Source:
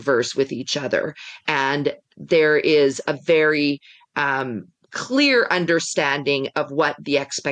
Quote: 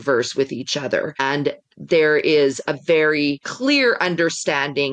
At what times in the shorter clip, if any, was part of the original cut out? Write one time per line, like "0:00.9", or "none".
0:01.2
0:03.5